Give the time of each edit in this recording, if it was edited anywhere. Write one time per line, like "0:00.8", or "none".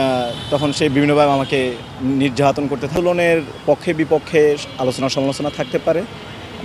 0:02.9